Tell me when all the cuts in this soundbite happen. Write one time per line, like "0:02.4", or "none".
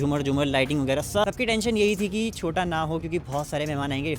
0:01.2